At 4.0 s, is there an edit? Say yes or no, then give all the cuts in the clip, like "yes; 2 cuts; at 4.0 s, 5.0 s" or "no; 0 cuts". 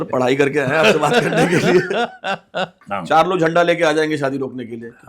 no; 1 cut; at 2.7 s